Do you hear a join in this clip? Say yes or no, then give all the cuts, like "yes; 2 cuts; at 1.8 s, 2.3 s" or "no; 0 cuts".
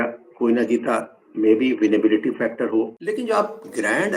yes; 1 cut; at 3.0 s